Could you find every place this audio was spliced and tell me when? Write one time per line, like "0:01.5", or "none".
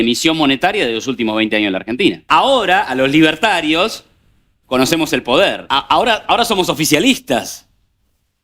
0:02.2
0:05.6